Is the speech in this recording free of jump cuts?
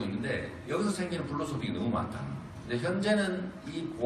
no; 1 cut; at 1.7 s

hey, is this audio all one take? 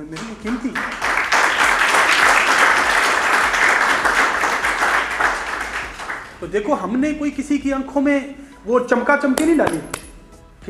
yes; 0 cuts

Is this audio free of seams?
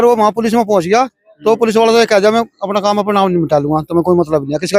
yes; 0 cuts

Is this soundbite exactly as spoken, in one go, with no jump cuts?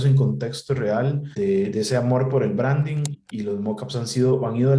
no; 2 cuts; at 1.3 s, 3.2 s

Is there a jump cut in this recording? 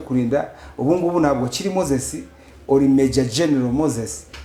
no; 0 cuts

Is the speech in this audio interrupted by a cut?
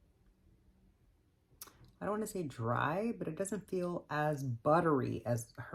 no; 0 cuts

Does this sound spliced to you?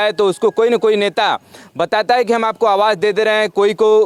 no; 0 cuts

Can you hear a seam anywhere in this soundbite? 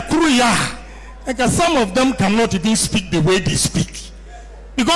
no; 0 cuts

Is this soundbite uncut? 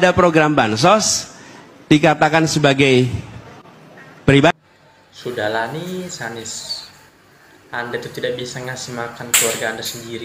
yes; 0 cuts

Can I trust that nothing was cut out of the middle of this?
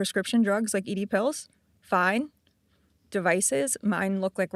yes; 0 cuts

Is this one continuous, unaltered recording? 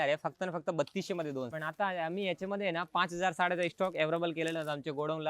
no; 1 cut; at 1.5 s

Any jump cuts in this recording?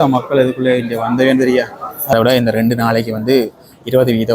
yes; 1 cut; at 2.1 s

